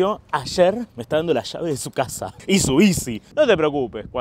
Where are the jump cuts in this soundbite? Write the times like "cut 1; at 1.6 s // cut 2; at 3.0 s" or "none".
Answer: cut 1; at 2.4 s // cut 2; at 3.3 s